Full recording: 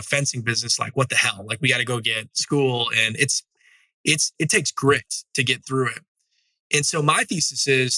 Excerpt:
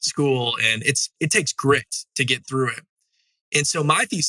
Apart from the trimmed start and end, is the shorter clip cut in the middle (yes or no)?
yes